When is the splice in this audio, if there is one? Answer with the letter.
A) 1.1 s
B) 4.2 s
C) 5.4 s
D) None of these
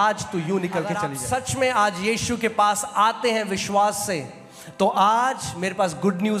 A